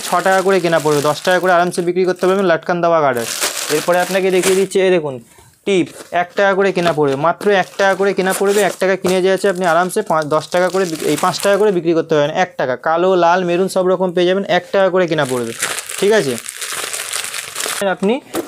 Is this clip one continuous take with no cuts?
yes; 0 cuts

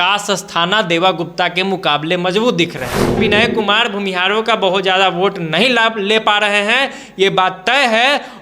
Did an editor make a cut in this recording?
yes; 1 cut; at 3.2 s

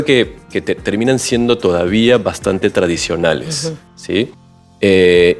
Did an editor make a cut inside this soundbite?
no; 0 cuts

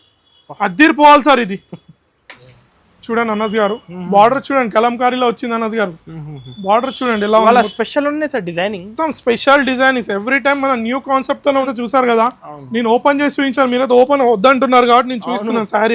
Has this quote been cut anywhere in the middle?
yes; 2 cuts; at 2.3 s, 11.7 s

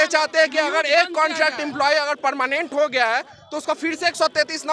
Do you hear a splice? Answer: no; 0 cuts

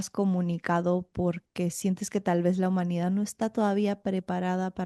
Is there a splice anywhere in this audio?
no; 0 cuts

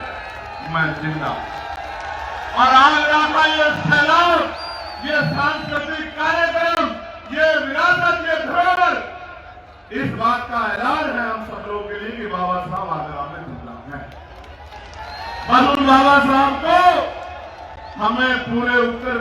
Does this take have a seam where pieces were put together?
no; 0 cuts

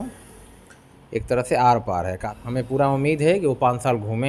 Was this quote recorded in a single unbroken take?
no; 1 cut; at 2.3 s

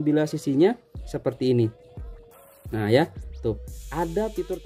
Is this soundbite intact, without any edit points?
yes; 0 cuts

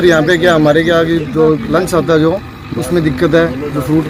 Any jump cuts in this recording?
no; 0 cuts

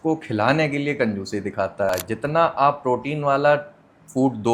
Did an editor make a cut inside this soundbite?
yes; 1 cut; at 1.9 s

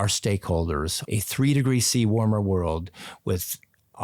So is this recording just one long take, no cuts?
no; 1 cut; at 1.0 s

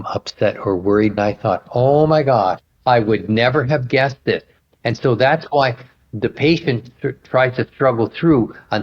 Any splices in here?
yes; 1 cut; at 1.1 s

